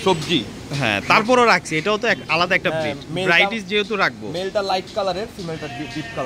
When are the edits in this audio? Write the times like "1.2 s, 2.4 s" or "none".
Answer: none